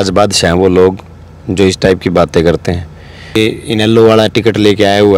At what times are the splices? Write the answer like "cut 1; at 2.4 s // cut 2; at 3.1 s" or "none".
cut 1; at 3.4 s